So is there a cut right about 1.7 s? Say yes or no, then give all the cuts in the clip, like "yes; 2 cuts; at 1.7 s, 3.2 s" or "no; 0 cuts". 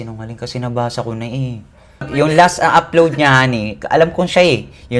yes; 1 cut; at 1.7 s